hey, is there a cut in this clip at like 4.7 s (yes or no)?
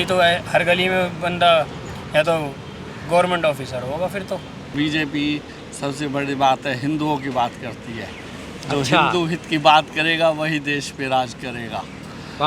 yes